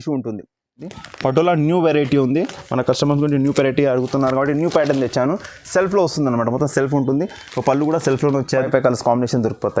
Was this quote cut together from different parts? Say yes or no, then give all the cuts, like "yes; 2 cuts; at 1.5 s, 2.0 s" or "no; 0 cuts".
yes; 2 cuts; at 1.0 s, 8.7 s